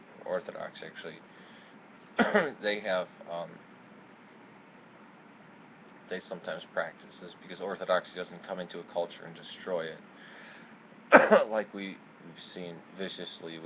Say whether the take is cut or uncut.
uncut